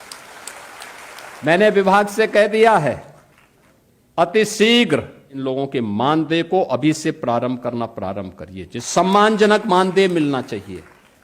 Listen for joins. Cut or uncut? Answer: cut